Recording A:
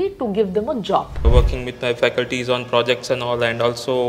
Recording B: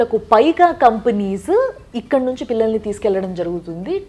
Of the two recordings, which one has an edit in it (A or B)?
A